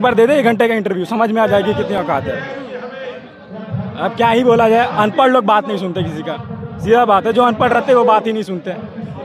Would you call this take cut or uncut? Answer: uncut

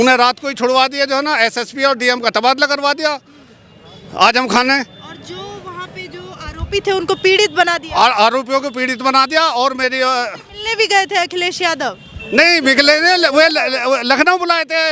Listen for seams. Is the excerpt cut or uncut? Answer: uncut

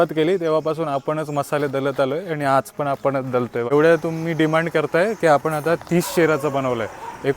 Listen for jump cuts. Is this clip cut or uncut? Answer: cut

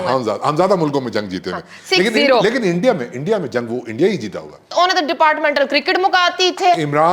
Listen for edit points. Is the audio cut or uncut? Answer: cut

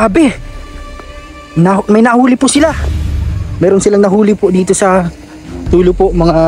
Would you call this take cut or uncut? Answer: uncut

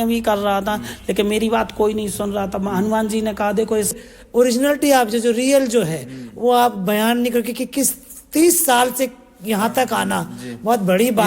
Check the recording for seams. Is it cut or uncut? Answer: cut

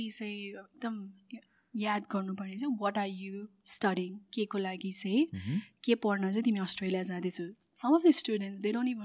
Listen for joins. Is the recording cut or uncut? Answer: uncut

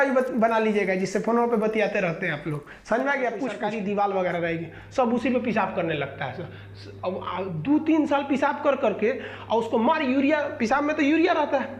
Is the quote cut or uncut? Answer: cut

